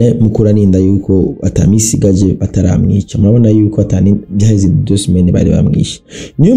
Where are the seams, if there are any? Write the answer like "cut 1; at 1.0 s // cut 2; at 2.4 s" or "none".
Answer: none